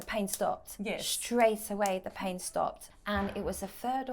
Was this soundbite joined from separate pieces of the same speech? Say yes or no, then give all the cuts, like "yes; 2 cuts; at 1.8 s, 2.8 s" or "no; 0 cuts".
yes; 1 cut; at 2.8 s